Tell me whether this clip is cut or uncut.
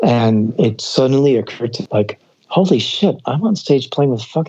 cut